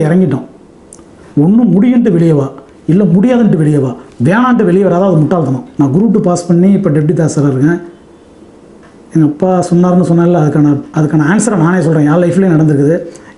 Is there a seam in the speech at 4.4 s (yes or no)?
no